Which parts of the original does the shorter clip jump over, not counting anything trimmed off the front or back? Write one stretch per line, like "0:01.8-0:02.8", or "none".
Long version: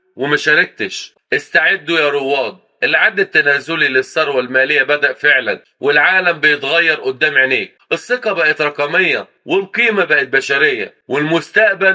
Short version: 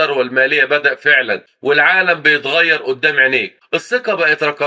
none